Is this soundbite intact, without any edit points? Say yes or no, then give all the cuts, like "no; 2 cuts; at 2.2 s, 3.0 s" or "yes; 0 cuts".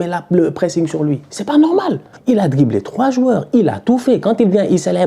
no; 1 cut; at 2.1 s